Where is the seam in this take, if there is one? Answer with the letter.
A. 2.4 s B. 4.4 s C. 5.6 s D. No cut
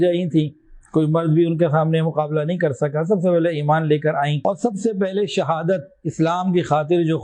B